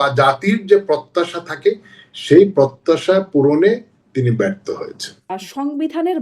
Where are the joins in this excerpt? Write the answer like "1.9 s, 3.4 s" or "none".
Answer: 5.3 s